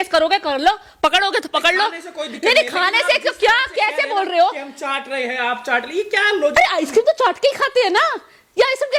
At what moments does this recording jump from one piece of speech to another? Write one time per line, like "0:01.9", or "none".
none